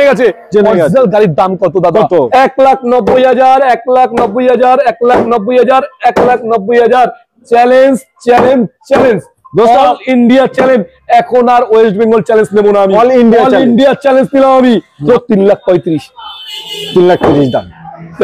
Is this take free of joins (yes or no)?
no